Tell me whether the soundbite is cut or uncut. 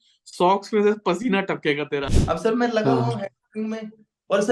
cut